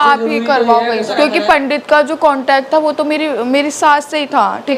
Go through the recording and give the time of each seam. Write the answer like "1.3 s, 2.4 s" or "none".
1.0 s